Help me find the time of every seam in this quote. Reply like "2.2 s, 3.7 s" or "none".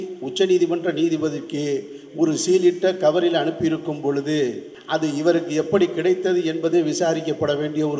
4.7 s